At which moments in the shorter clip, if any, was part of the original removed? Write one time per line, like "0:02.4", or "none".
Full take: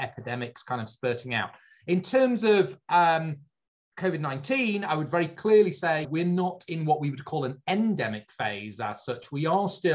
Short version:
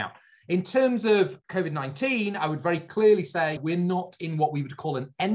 0:01.4